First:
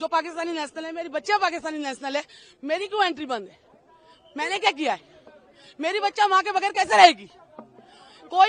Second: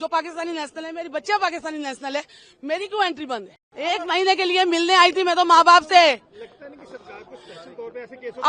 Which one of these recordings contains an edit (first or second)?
second